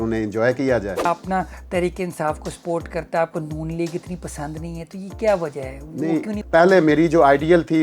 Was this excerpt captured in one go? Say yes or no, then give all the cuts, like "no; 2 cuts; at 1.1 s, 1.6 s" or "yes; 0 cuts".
no; 2 cuts; at 1.1 s, 6.4 s